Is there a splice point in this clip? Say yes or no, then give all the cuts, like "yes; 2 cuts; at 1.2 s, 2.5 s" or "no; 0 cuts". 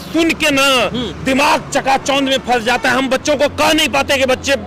no; 0 cuts